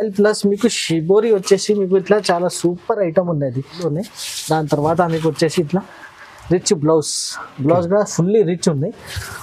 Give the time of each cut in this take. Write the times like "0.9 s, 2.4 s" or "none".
3.8 s